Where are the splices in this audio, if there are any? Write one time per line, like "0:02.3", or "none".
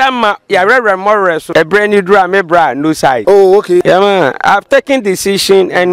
0:01.4
0:03.2
0:03.8